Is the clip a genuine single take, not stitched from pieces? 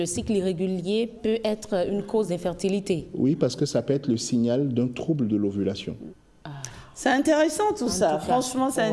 no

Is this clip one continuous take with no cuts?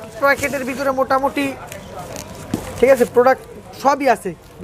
yes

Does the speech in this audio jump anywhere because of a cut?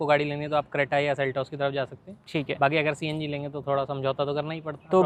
no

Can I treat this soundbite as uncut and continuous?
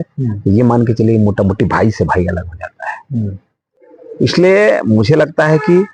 yes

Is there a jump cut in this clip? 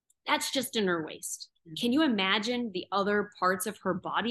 yes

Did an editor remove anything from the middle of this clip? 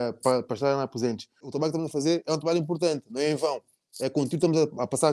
yes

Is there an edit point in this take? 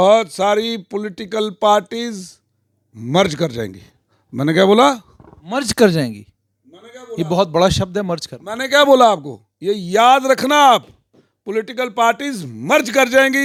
no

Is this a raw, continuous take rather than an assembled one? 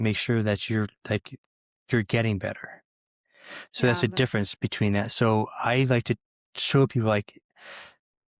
yes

